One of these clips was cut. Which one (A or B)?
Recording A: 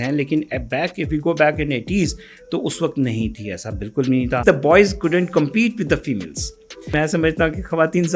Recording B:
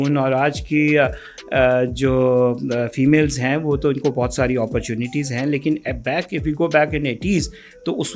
A